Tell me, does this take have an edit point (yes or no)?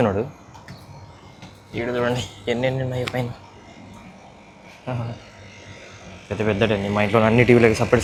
no